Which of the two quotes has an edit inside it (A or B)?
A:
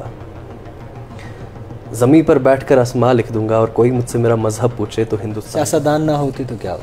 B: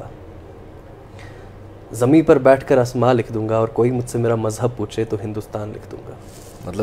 A